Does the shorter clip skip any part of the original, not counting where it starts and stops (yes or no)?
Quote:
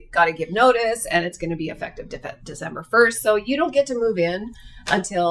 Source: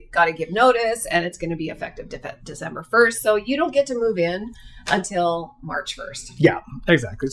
no